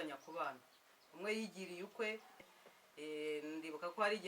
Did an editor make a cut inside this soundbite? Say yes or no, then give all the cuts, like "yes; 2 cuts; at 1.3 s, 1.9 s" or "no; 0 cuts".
yes; 1 cut; at 2.4 s